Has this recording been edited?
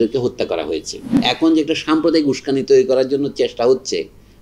yes; 1 cut; at 1.1 s

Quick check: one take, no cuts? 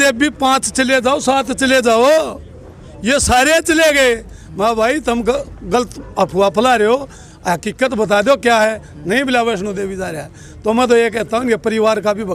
yes; 0 cuts

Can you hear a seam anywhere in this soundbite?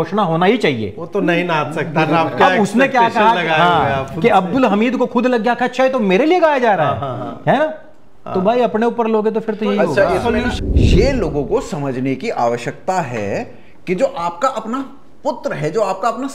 yes; 1 cut; at 10.5 s

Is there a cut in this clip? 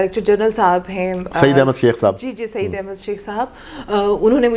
no; 0 cuts

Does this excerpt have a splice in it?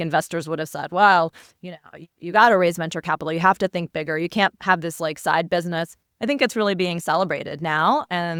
no; 0 cuts

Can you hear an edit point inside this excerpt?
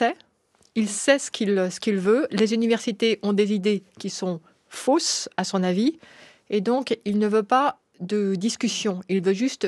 no; 0 cuts

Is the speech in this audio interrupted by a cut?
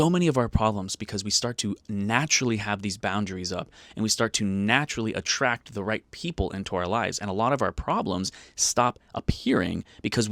no; 0 cuts

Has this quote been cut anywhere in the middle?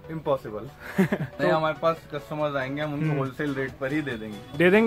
yes; 1 cut; at 1.4 s

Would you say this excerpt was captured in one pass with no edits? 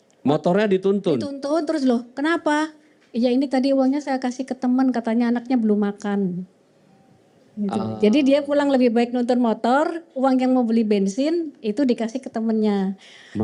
yes; 0 cuts

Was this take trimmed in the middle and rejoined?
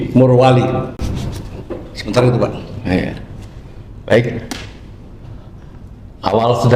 no; 0 cuts

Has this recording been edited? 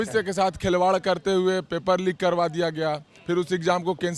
no; 0 cuts

